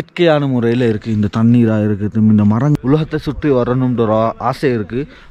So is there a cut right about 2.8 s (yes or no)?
yes